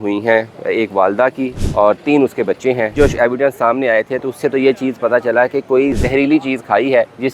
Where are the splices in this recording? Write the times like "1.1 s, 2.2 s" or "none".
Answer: 1.6 s, 2.9 s, 6.0 s